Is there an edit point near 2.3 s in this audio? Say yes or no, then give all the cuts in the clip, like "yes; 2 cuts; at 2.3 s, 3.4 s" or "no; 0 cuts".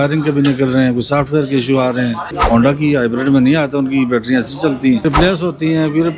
yes; 2 cuts; at 2.3 s, 5.0 s